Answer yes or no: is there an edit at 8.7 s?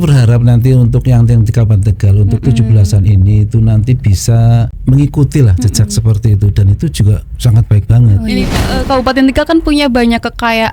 yes